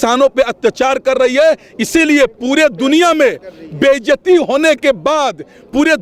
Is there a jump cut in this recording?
no; 0 cuts

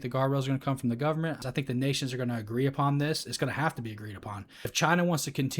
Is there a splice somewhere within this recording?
yes; 2 cuts; at 1.4 s, 4.7 s

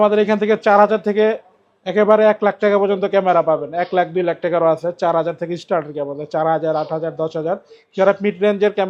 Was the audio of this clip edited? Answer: no; 0 cuts

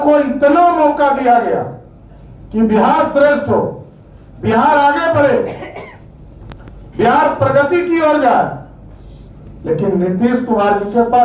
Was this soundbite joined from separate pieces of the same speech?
no; 0 cuts

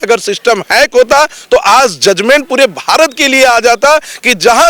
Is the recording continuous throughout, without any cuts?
yes; 0 cuts

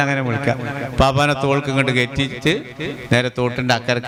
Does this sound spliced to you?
no; 0 cuts

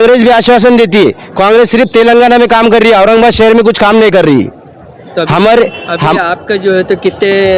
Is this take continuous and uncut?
yes; 0 cuts

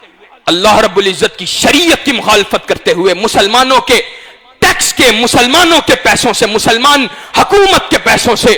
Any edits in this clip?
no; 0 cuts

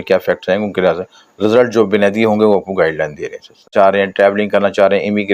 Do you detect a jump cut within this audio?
yes; 1 cut; at 3.7 s

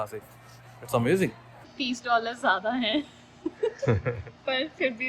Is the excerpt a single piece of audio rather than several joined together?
no; 1 cut; at 1.6 s

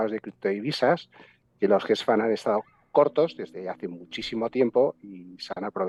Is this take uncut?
yes; 0 cuts

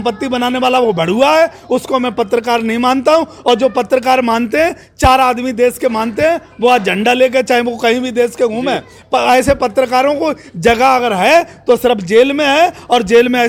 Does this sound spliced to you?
no; 0 cuts

